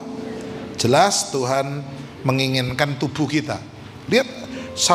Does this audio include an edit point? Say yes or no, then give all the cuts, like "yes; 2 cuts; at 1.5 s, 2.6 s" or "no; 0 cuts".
no; 0 cuts